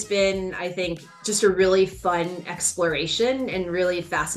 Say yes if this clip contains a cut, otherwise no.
no